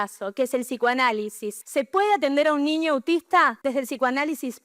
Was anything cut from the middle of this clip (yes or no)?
yes